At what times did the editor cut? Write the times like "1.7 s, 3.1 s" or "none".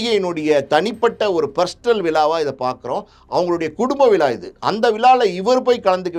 none